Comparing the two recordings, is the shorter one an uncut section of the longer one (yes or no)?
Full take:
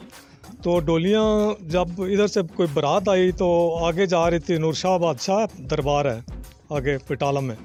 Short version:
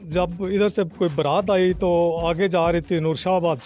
yes